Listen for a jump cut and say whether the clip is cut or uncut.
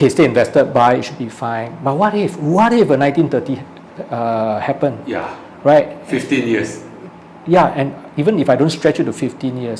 uncut